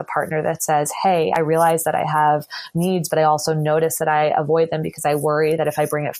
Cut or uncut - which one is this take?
uncut